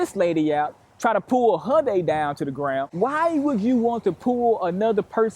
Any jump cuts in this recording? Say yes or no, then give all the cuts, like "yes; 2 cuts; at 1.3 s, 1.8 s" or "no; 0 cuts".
yes; 1 cut; at 2.9 s